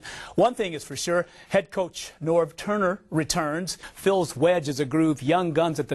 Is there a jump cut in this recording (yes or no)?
yes